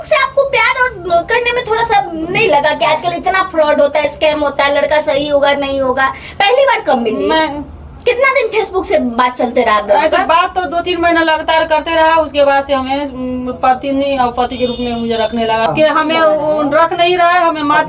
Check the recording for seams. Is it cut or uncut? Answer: cut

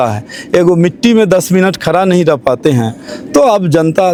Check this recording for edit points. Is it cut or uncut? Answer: uncut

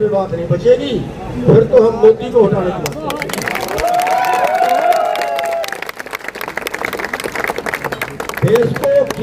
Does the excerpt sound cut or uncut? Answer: uncut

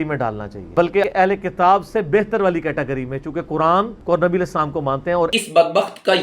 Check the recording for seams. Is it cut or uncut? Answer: cut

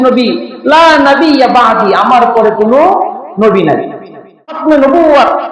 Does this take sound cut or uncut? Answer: cut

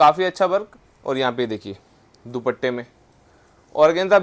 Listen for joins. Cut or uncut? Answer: uncut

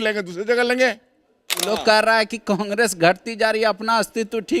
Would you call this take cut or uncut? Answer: cut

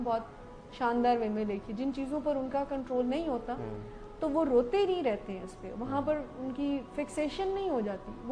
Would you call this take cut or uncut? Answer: uncut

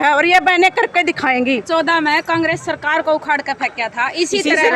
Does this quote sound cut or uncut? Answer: cut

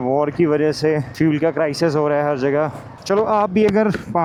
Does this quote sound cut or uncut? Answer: uncut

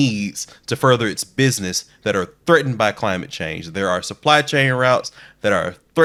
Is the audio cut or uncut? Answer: uncut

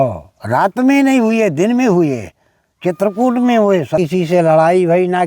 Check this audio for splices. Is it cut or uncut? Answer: cut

